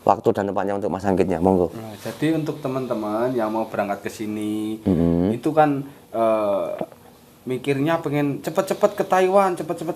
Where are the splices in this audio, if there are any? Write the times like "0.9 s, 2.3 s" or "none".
none